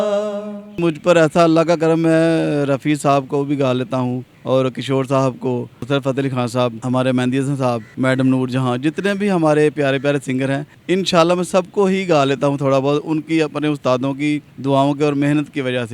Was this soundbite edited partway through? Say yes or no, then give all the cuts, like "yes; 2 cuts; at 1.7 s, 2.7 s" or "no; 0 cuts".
yes; 7 cuts; at 0.8 s, 4.3 s, 5.8 s, 6.8 s, 7.9 s, 10.7 s, 14.5 s